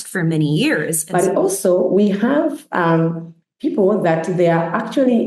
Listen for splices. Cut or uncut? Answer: cut